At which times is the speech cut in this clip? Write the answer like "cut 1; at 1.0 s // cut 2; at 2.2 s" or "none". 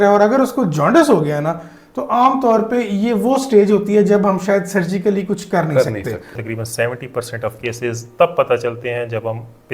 cut 1; at 6.4 s